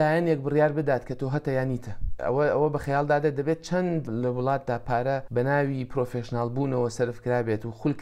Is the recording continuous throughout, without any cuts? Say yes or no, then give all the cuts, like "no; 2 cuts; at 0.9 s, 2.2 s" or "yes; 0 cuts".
no; 2 cuts; at 2.1 s, 4.1 s